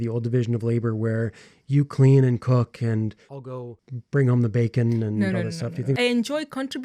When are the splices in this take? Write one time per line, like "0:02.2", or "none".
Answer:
0:03.5
0:05.9